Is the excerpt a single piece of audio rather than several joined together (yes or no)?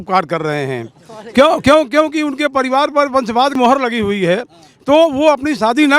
no